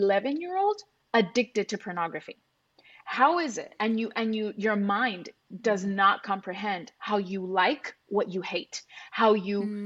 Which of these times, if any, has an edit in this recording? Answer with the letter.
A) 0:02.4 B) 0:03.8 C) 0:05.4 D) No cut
D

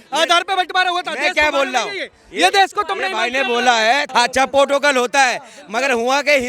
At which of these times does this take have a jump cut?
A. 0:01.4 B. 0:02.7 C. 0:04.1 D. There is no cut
C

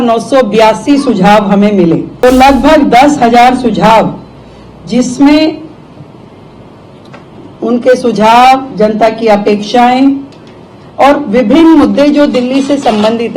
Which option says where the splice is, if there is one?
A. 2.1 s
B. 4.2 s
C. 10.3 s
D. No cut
A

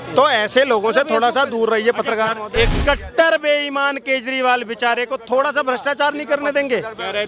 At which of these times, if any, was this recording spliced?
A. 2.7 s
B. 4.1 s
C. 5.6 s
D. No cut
A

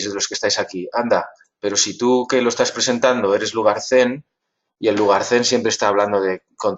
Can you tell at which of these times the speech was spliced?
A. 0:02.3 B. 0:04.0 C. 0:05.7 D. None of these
A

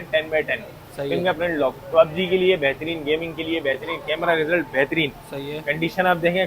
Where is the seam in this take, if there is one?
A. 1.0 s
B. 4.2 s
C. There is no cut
C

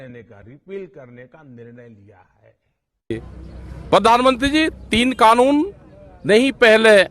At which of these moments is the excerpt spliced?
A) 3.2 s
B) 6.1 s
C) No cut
A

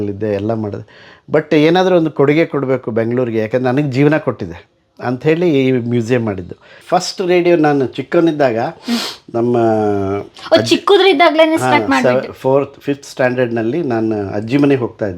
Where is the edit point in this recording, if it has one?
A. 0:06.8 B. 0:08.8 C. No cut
A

